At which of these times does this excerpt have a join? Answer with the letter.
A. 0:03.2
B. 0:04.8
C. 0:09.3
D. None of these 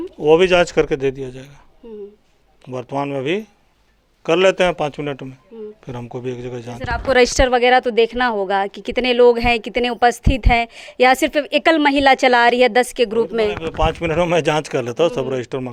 D